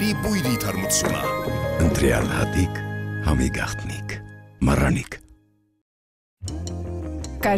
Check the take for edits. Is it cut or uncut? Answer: uncut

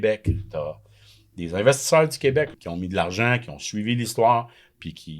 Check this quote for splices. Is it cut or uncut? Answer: cut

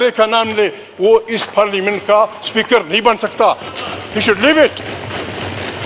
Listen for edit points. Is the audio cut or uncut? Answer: uncut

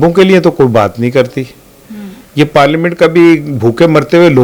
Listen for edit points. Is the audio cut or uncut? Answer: uncut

